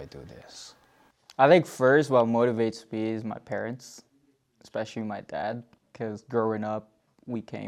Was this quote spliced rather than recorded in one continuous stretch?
no; 0 cuts

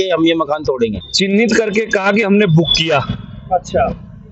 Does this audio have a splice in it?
yes; 1 cut; at 1.0 s

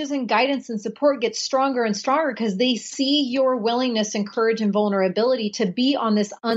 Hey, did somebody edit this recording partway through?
no; 0 cuts

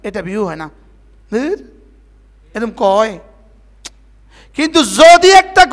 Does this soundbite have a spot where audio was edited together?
no; 0 cuts

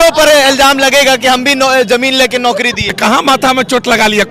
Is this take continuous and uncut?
no; 1 cut; at 2.9 s

